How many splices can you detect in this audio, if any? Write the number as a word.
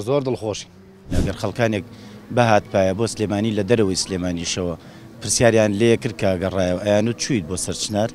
one